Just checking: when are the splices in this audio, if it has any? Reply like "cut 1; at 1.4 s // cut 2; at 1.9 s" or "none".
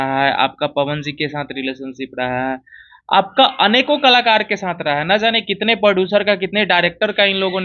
none